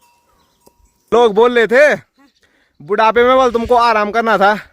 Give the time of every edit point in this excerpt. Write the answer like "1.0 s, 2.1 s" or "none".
1.1 s